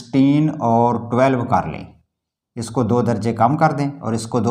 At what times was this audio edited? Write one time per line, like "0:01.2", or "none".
none